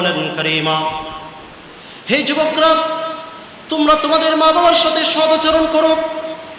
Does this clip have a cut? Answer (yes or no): no